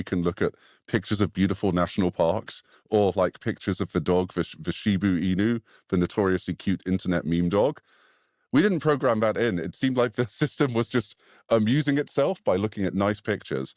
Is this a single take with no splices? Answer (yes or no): yes